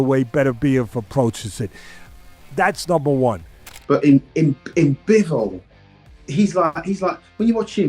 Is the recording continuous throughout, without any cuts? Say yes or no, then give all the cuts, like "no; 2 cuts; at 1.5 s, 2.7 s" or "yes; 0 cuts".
no; 1 cut; at 3.7 s